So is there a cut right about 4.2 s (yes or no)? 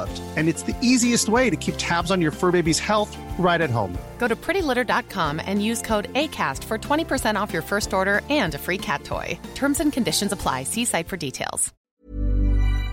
no